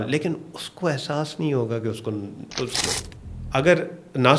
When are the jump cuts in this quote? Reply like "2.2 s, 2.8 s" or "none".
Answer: 2.9 s